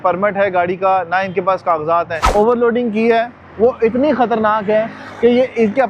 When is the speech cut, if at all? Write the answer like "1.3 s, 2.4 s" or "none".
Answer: 2.2 s